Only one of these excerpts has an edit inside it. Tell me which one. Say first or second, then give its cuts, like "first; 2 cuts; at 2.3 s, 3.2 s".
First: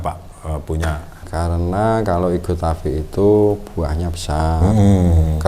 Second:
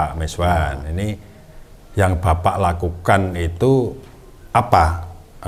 first; 1 cut; at 1.1 s